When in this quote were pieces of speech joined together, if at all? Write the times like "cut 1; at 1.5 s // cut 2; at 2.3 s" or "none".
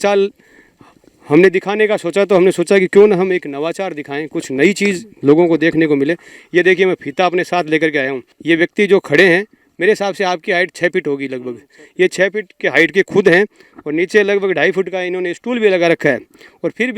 cut 1; at 8.3 s

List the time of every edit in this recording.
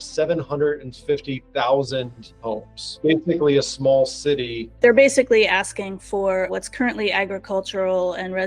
cut 1; at 3.0 s // cut 2; at 4.6 s // cut 3; at 6.5 s

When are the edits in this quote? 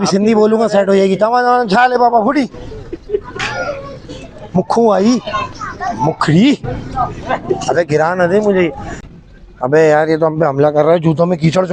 cut 1; at 8.9 s

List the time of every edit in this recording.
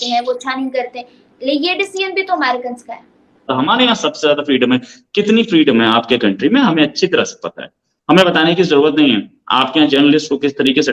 cut 1; at 3.5 s

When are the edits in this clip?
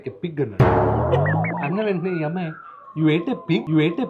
none

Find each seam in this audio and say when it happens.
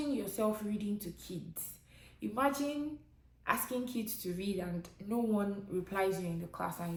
none

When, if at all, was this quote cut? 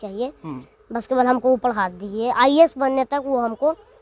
none

